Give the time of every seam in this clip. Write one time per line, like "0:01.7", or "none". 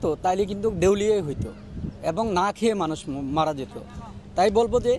none